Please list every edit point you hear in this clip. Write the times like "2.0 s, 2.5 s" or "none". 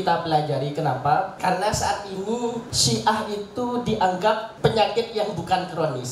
1.3 s, 2.7 s, 4.5 s